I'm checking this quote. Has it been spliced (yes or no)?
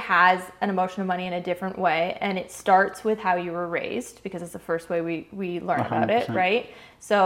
no